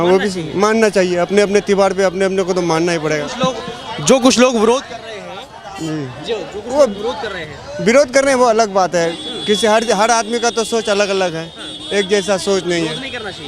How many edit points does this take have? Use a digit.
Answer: 0